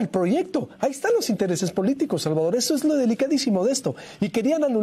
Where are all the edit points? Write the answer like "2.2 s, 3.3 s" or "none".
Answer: none

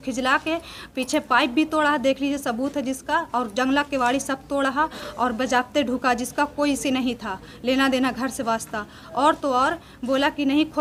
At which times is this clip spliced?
none

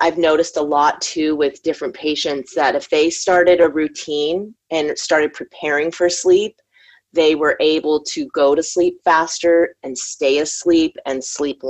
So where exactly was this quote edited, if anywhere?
none

